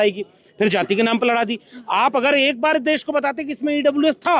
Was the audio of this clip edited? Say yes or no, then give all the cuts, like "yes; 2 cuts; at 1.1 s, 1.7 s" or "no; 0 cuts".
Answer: no; 0 cuts